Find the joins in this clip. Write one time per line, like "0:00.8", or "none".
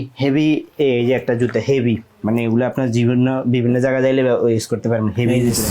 none